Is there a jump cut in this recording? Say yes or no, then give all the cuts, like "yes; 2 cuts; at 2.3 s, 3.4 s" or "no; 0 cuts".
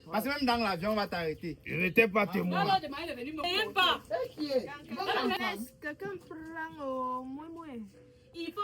yes; 1 cut; at 3.4 s